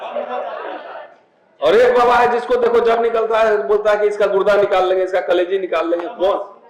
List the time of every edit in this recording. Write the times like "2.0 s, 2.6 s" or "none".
none

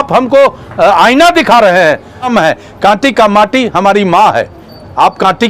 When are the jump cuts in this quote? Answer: 2.3 s

